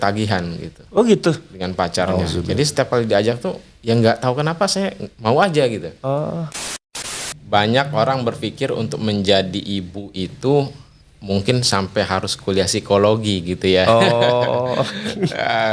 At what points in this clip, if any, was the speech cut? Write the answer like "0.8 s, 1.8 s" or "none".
6.8 s

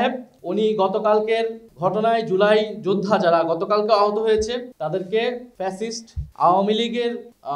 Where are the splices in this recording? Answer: none

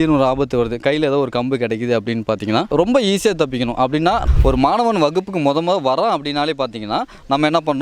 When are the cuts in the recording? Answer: 2.7 s, 4.2 s

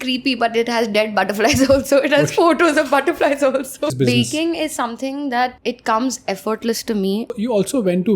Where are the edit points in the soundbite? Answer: 3.9 s, 5.6 s, 7.3 s

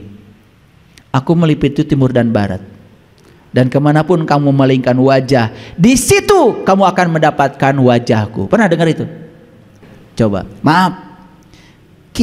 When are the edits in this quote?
10.5 s

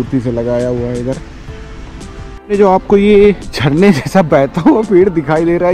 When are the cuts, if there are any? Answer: 2.3 s, 3.5 s

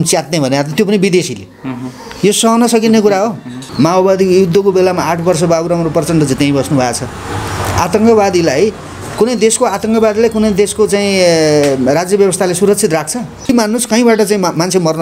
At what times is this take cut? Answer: 3.6 s, 13.5 s

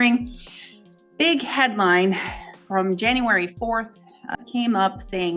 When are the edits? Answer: 4.4 s

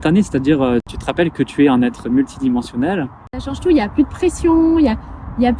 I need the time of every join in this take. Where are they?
1.0 s, 3.5 s

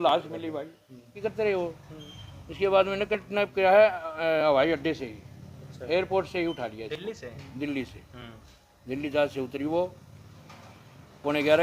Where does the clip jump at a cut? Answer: 1.1 s

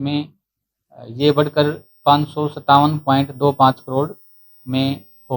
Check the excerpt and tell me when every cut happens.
none

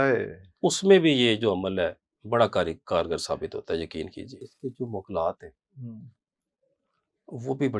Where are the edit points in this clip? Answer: 4.5 s

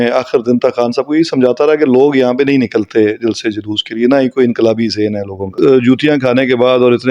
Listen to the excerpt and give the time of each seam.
5.5 s

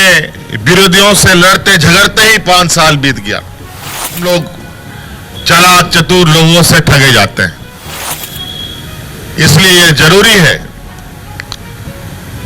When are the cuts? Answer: 4.2 s, 8.2 s

